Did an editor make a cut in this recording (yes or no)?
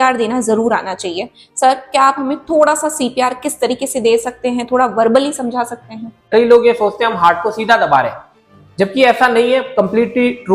yes